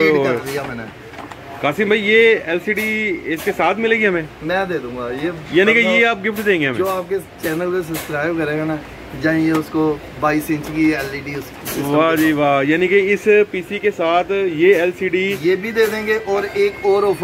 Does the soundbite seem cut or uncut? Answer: uncut